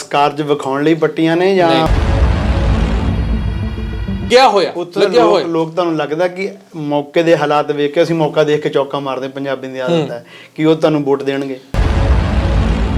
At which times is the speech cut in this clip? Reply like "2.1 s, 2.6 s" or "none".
1.9 s, 4.2 s